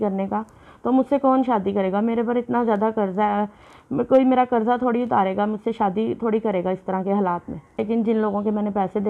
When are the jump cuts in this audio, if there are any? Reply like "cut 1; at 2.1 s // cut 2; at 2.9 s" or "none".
cut 1; at 7.8 s